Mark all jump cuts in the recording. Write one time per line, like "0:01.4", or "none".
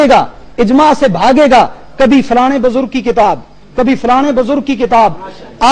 none